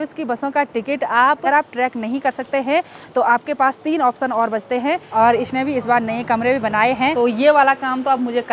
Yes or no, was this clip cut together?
yes